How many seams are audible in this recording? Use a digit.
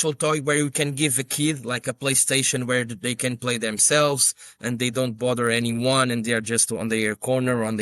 0